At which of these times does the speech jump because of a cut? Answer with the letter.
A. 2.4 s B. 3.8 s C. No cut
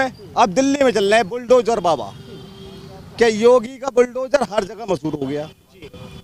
C